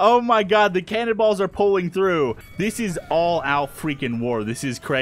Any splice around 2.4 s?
yes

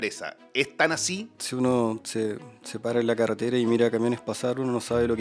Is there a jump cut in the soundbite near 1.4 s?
yes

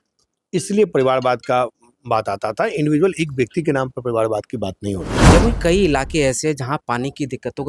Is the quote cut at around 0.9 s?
no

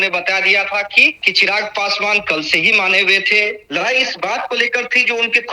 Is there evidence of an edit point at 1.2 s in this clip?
yes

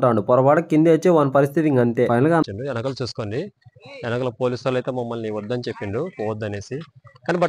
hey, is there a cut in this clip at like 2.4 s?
yes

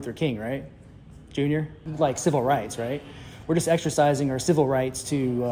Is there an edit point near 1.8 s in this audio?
yes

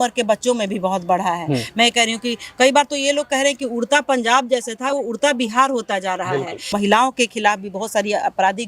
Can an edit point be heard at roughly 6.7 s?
yes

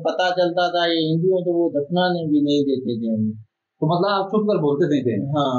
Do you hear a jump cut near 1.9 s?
no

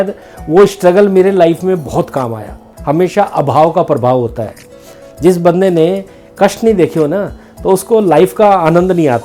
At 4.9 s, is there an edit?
no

